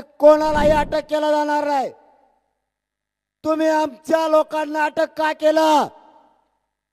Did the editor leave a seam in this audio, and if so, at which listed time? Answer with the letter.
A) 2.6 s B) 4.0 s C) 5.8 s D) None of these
D